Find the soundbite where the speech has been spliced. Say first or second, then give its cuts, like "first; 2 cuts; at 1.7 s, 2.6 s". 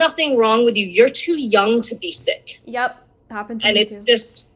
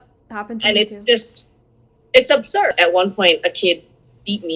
second; 1 cut; at 2.7 s